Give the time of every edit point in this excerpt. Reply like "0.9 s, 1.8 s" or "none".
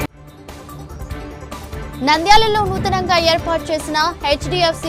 none